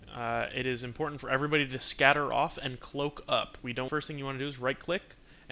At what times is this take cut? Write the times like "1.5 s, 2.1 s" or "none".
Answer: 3.9 s